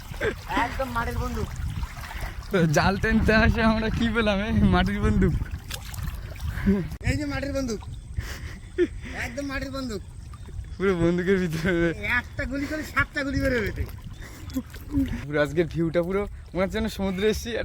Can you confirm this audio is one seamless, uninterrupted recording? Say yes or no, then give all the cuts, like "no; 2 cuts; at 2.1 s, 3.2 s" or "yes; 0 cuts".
no; 2 cuts; at 6.9 s, 15.3 s